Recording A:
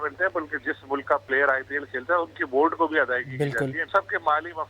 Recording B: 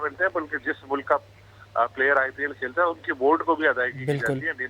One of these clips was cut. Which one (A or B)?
A